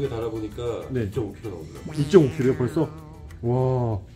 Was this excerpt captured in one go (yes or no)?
yes